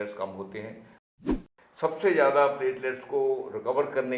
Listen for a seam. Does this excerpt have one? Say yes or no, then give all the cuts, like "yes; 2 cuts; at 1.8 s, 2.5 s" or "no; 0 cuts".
yes; 1 cut; at 1.2 s